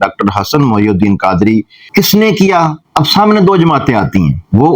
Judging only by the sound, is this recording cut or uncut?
cut